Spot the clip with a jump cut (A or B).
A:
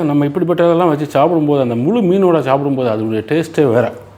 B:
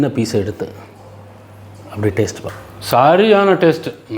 B